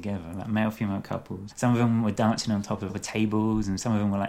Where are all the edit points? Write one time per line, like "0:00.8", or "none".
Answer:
0:01.4
0:02.9